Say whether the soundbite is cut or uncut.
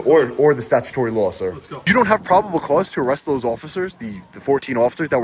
cut